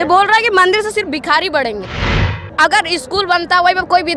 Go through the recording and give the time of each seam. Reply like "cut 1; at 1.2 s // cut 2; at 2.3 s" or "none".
cut 1; at 2.3 s